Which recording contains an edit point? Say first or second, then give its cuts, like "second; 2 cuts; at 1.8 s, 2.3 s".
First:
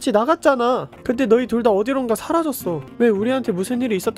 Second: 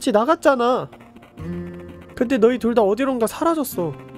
first; 2 cuts; at 0.9 s, 2.9 s